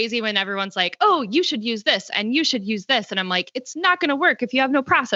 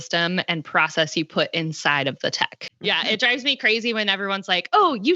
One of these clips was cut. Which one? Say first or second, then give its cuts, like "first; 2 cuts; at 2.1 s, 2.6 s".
second; 1 cut; at 2.6 s